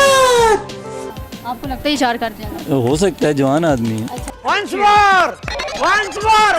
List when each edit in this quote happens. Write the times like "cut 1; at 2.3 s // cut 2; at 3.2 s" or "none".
none